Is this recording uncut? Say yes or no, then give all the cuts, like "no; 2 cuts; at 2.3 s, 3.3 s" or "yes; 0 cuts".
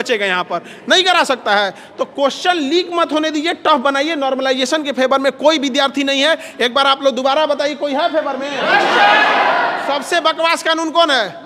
yes; 0 cuts